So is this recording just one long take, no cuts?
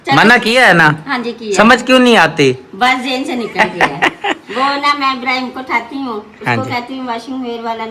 yes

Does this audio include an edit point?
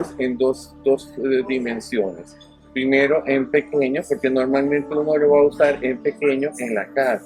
no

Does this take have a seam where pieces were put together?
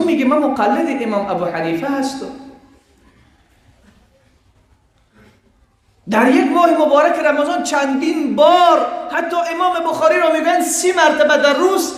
no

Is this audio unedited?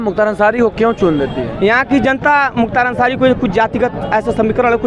yes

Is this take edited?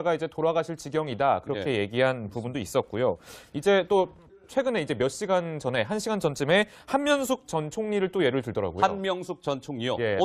no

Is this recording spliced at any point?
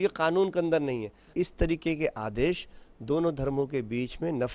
yes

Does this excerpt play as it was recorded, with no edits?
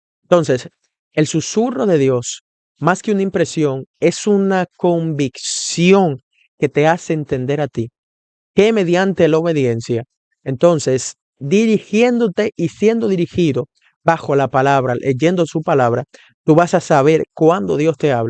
yes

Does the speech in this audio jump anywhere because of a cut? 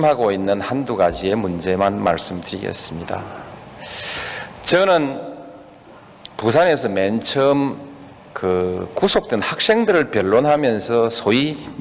yes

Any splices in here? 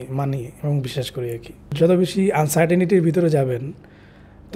yes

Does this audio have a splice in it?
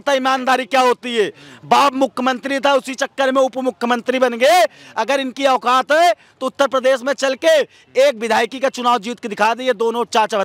no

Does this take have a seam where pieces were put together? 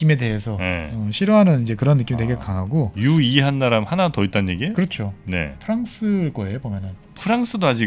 no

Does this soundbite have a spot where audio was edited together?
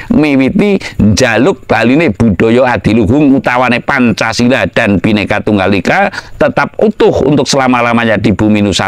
no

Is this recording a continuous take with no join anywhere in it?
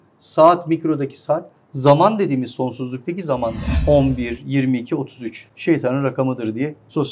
no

